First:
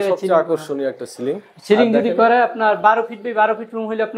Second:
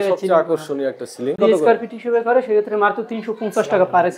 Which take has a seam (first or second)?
second